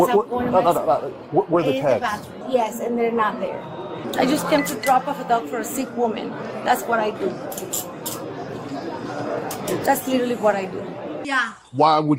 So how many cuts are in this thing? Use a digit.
3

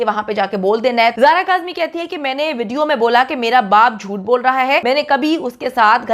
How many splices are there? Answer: 2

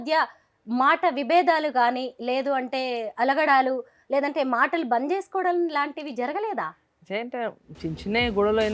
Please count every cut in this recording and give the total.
0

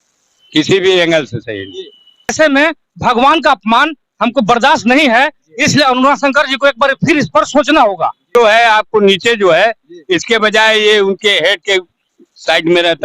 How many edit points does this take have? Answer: 2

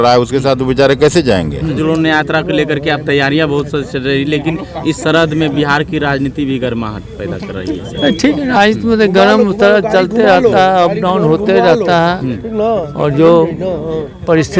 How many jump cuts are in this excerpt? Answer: 1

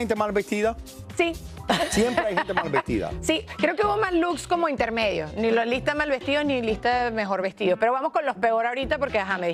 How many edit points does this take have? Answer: 0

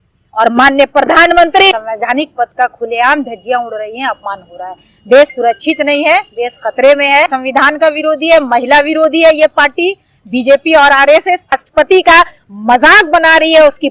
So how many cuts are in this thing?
3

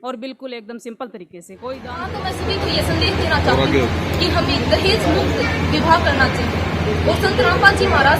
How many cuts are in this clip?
1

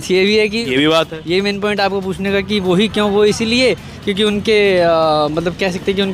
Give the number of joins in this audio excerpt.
0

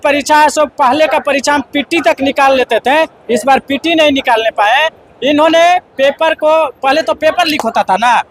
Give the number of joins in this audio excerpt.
0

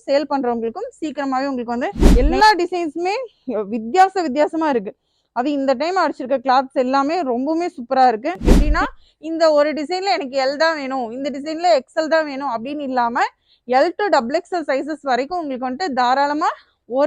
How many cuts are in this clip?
2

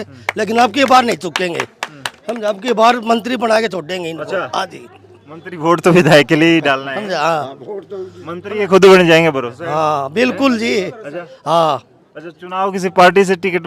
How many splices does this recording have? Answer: 0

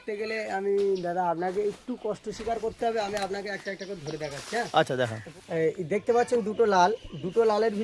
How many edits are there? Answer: 1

